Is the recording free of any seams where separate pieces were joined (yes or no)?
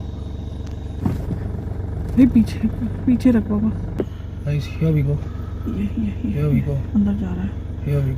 no